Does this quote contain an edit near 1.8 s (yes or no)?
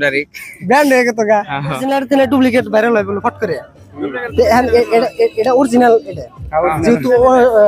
yes